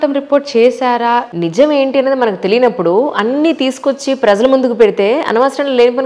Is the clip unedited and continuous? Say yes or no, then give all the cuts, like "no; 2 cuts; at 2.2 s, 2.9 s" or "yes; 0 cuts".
no; 1 cut; at 1.3 s